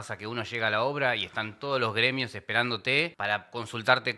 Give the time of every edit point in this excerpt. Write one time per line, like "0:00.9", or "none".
0:03.1